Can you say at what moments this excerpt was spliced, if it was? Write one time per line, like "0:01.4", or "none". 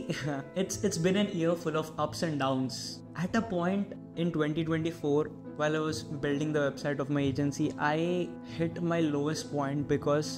none

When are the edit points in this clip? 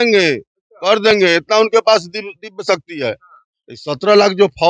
none

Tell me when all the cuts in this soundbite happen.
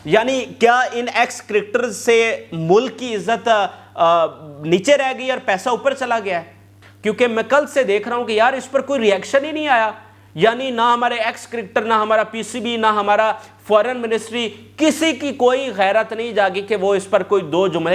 0:06.6

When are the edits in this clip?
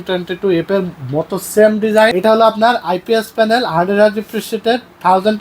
0:02.1

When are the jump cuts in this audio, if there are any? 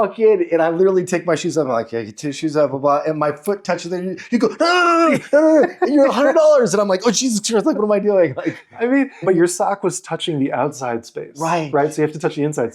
0:09.2

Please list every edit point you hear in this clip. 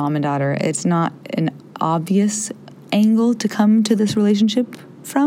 none

